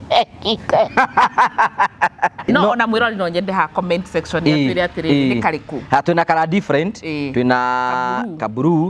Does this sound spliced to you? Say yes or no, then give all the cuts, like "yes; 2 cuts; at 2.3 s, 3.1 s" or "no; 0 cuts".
yes; 1 cut; at 2.4 s